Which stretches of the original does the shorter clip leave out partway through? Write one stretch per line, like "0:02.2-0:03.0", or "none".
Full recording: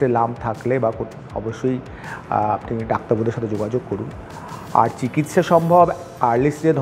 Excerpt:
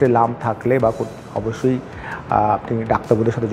none